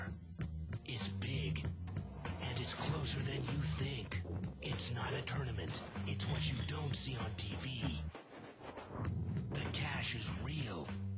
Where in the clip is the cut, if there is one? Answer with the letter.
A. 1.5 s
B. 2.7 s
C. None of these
B